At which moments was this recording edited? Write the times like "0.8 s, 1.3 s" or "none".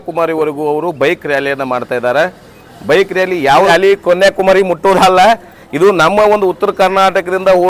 3.7 s